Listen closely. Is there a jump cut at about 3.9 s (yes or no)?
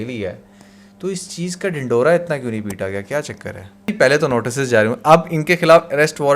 yes